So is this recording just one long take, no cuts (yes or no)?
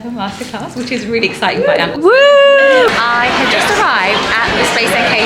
no